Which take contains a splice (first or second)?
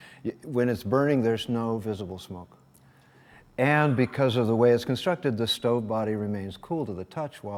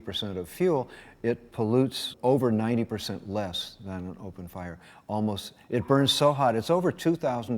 second